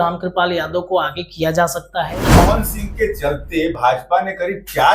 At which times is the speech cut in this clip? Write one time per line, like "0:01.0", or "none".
0:02.4